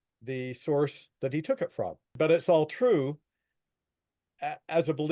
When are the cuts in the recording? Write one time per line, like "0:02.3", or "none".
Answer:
0:02.1

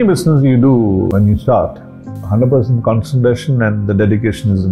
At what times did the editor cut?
0:01.1
0:02.2

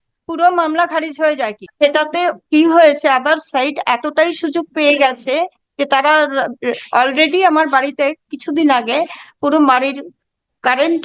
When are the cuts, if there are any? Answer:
0:01.6

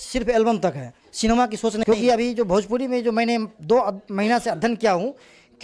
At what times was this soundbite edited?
0:01.8

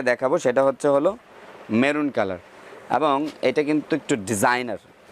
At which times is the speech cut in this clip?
0:02.6

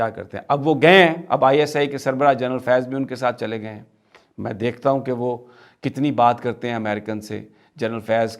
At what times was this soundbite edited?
none

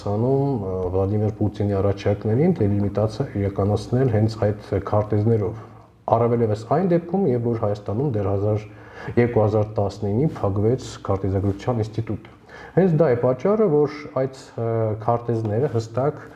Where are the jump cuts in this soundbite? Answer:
none

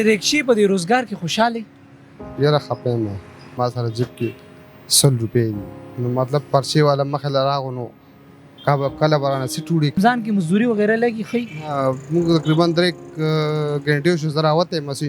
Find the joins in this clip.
0:03.5
0:10.0

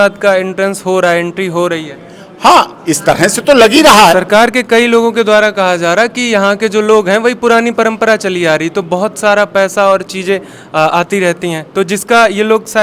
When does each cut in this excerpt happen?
0:04.2

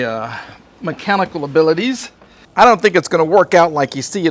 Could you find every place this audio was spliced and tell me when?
0:02.4

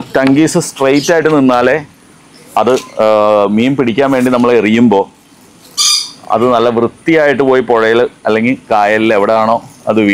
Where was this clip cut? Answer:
none

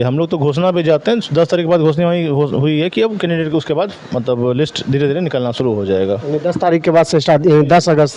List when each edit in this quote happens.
none

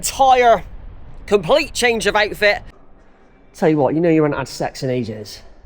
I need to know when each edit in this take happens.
0:02.8

